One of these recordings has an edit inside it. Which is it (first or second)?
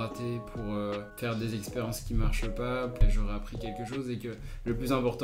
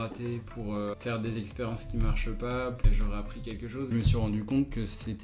second